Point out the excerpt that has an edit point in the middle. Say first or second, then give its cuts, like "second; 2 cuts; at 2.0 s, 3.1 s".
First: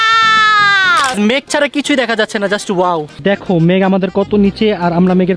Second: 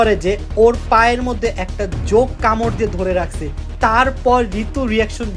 first; 2 cuts; at 1.1 s, 3.2 s